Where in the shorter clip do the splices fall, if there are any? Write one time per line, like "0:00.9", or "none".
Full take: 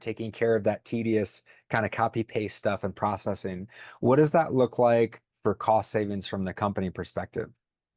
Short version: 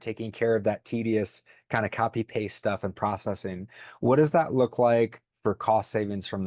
none